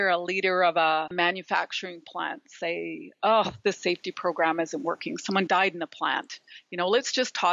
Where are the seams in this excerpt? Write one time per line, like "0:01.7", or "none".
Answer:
none